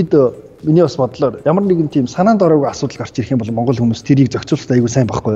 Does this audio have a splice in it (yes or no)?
no